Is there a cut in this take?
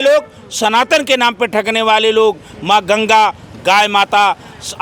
no; 0 cuts

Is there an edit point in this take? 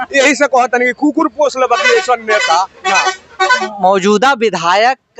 yes; 1 cut; at 3.5 s

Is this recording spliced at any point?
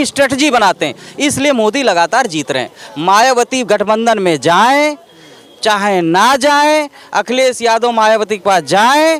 no; 0 cuts

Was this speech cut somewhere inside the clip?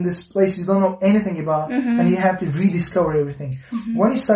no; 0 cuts

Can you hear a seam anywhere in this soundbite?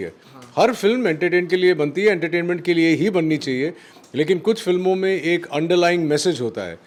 no; 0 cuts

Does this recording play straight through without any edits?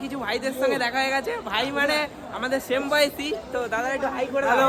yes; 0 cuts

